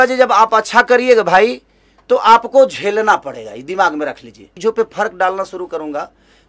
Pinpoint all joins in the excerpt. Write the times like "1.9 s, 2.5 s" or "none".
4.5 s